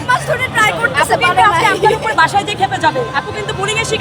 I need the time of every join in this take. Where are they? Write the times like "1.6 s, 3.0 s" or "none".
none